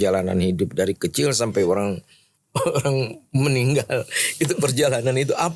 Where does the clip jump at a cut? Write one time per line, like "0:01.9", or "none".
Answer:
none

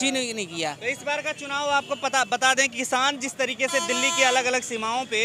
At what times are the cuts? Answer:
none

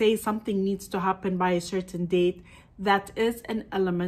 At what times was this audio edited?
none

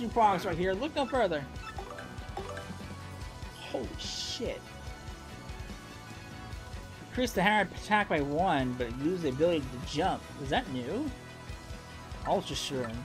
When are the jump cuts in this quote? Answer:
none

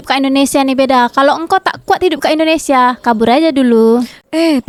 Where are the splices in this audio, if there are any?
none

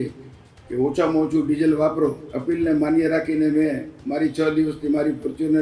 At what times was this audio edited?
0:02.3

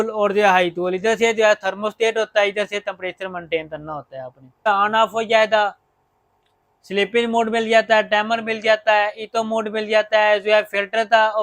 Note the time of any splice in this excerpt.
0:04.7

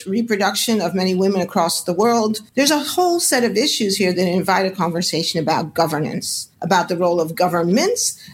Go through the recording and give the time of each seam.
0:02.4

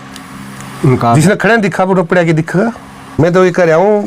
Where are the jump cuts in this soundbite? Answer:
0:03.2

